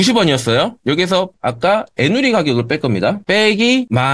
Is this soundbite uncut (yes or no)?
no